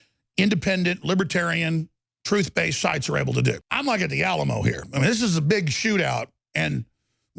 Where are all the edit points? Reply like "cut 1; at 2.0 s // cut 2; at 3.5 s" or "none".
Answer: cut 1; at 3.7 s

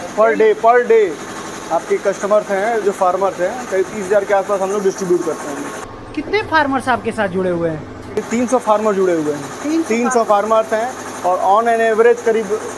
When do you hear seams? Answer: none

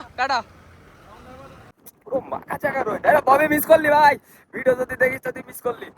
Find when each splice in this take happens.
cut 1; at 1.7 s

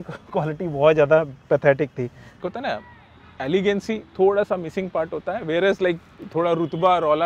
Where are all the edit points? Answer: cut 1; at 2.3 s

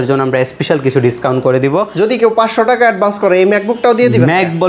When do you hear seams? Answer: cut 1; at 1.9 s

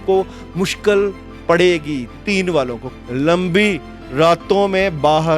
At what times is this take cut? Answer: cut 1; at 2.9 s

